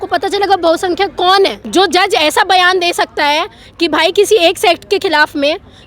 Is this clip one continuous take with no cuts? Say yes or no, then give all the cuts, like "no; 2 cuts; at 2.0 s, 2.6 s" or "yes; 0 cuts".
no; 1 cut; at 1.6 s